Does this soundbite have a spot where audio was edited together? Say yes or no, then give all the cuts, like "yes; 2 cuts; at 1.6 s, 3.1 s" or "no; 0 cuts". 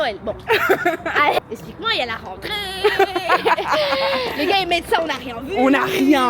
no; 0 cuts